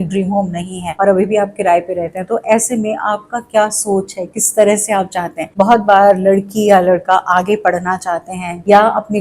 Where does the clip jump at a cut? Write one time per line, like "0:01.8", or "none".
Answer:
0:05.5